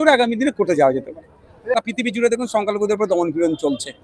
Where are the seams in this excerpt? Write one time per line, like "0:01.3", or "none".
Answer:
0:01.7